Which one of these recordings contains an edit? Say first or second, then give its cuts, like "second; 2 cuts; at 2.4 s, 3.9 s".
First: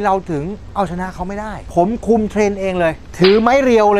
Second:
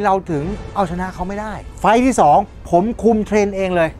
first; 2 cuts; at 1.6 s, 3.0 s